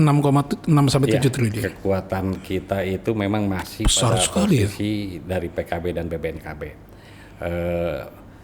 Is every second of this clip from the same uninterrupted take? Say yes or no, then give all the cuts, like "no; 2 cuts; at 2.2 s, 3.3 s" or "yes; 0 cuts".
yes; 0 cuts